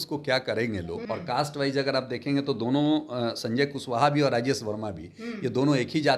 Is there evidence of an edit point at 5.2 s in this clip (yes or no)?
no